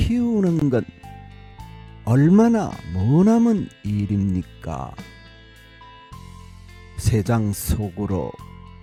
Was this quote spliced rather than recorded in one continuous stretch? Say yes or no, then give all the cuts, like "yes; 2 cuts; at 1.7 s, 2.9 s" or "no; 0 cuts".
no; 0 cuts